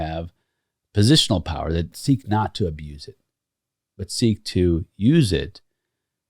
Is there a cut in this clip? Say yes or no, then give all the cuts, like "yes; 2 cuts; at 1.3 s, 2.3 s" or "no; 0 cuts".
yes; 1 cut; at 1.9 s